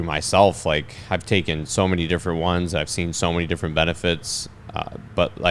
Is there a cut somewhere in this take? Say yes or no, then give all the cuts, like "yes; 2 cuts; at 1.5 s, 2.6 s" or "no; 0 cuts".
no; 0 cuts